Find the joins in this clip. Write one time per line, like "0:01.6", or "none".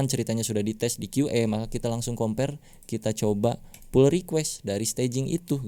none